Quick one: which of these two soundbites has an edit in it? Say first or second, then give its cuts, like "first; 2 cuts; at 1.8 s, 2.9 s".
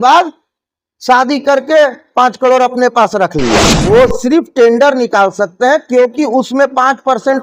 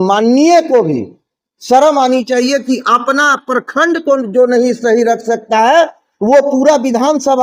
first; 1 cut; at 3.7 s